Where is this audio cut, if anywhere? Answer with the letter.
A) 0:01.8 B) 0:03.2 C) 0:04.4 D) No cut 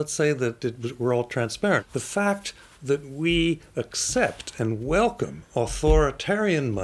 A